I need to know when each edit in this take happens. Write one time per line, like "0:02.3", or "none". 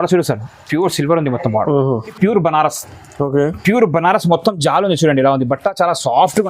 0:02.2

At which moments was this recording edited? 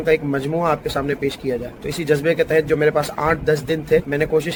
none

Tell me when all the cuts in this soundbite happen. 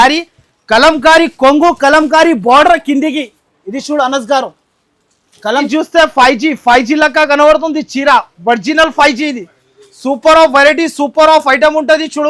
0:05.7

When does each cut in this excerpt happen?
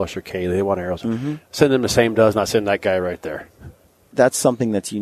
0:04.1

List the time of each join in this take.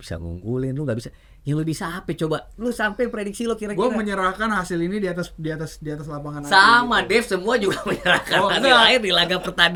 none

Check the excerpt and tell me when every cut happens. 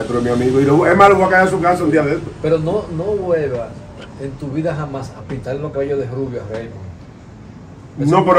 none

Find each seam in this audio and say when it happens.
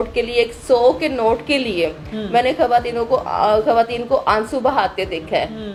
none

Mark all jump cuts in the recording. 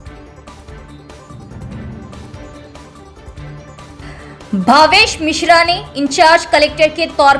0:01.3
0:02.2

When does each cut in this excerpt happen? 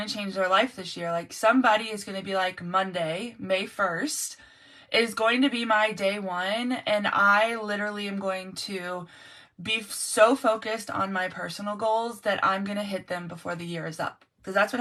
none

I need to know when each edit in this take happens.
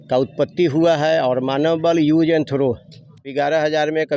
0:03.2

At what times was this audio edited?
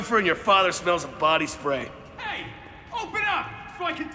none

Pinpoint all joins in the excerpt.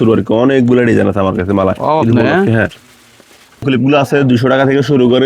none

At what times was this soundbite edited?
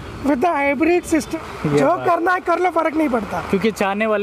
0:01.3

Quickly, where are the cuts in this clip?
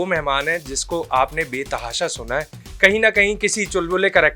0:02.6

